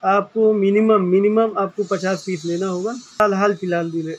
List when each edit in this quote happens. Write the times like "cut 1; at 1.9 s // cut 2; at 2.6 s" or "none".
cut 1; at 3.2 s